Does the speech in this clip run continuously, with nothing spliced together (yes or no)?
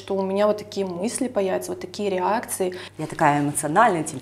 no